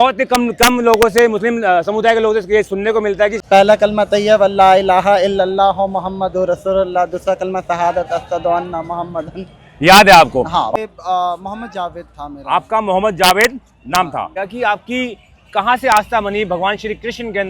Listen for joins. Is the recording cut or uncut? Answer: cut